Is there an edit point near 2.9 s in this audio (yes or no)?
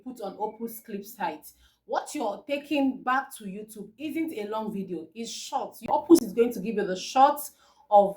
no